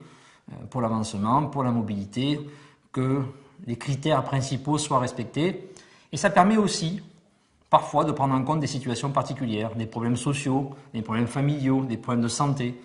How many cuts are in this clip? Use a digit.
0